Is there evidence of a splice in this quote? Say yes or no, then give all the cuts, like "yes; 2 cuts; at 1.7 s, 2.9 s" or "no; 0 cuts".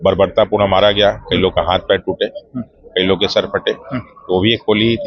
no; 0 cuts